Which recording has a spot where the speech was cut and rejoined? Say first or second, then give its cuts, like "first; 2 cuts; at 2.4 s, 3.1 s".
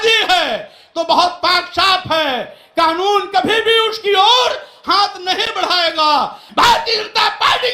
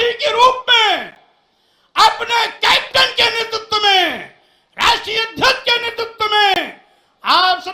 first; 1 cut; at 6.4 s